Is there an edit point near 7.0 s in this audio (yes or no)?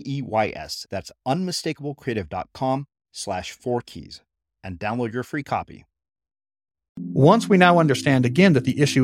yes